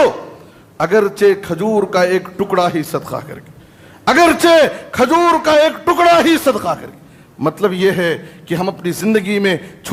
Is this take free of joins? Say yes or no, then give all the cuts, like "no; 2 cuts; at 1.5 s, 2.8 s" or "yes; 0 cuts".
yes; 0 cuts